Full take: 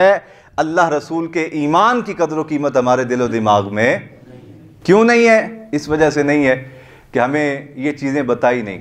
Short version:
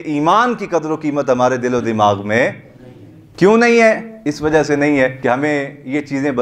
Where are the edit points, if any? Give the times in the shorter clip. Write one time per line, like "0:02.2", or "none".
0:05.2